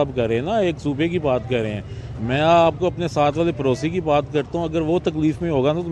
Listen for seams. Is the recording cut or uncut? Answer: uncut